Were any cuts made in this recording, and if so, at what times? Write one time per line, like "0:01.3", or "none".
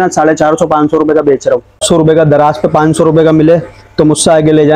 0:01.8